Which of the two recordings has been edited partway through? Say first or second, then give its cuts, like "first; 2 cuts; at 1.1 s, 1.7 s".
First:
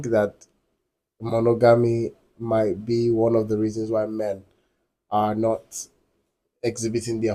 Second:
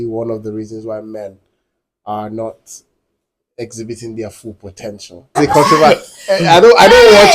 second; 1 cut; at 5.4 s